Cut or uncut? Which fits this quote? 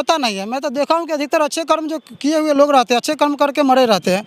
uncut